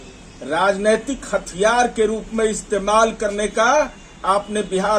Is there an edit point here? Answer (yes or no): no